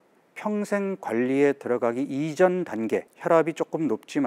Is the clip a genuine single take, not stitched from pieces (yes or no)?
no